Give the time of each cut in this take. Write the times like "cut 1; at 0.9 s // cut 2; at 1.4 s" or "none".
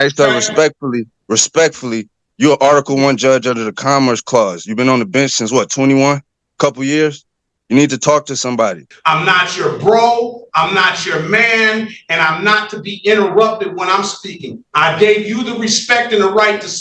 cut 1; at 8.9 s